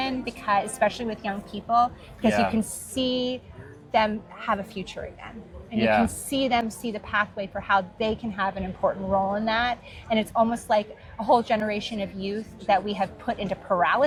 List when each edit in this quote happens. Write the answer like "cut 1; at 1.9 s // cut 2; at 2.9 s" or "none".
none